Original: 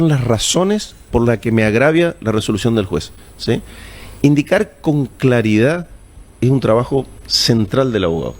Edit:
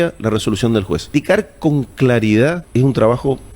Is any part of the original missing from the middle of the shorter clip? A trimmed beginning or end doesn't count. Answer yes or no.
yes